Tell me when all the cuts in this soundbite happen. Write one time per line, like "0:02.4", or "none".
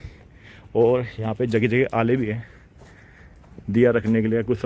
none